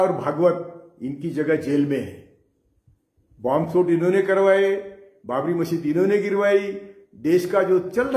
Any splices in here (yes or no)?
no